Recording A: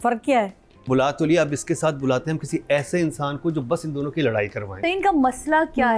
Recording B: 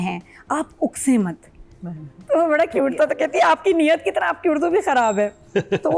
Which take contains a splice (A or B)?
A